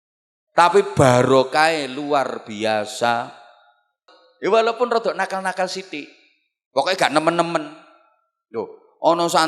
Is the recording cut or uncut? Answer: cut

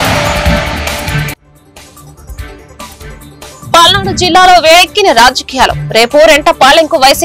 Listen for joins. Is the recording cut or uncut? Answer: cut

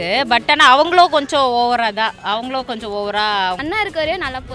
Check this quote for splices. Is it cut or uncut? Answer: cut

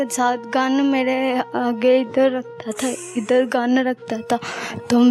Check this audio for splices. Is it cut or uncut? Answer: uncut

